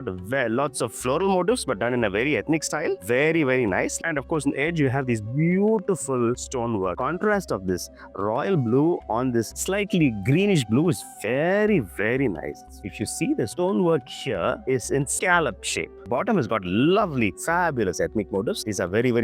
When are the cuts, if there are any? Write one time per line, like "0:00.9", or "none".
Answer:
0:04.0
0:06.9
0:12.9
0:16.1